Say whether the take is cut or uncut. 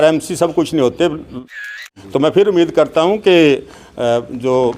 cut